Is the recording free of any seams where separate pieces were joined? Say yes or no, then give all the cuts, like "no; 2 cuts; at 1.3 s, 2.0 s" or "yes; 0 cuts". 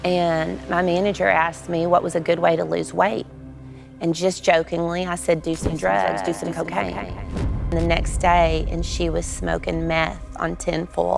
no; 1 cut; at 7.7 s